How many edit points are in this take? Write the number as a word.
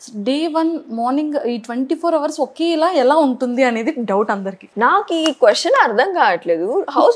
one